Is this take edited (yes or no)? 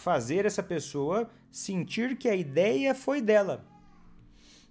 no